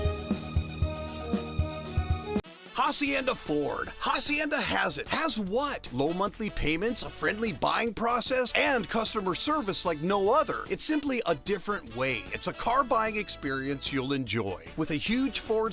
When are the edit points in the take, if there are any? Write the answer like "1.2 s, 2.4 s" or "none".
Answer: 2.4 s